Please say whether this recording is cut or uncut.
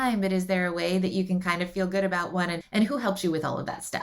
cut